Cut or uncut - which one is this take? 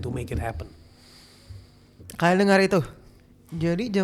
uncut